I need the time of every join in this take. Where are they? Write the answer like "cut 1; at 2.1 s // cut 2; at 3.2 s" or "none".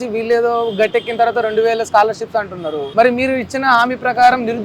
cut 1; at 2.8 s